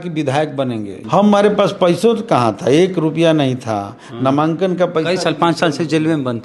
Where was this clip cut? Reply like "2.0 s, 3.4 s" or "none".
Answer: 1.0 s